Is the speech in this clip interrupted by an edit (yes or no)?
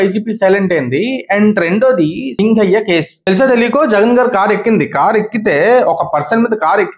yes